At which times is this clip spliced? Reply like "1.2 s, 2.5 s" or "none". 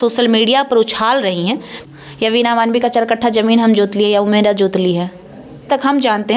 1.7 s, 5.7 s